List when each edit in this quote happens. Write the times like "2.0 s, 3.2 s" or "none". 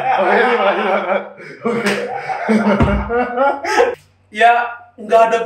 3.9 s